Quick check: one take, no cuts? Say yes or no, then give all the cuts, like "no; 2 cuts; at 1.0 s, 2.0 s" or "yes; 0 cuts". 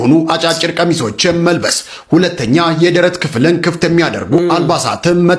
yes; 0 cuts